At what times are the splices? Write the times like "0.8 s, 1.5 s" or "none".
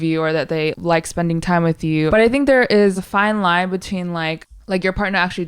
0.7 s, 2.1 s, 3.0 s, 4.4 s